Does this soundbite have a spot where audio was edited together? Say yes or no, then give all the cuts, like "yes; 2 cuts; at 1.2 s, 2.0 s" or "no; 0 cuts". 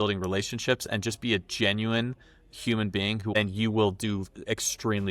yes; 1 cut; at 3.4 s